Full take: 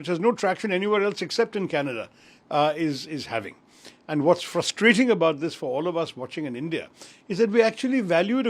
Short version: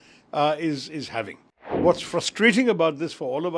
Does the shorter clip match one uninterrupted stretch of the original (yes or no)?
no